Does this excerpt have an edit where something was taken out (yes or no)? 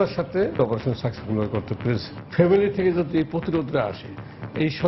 no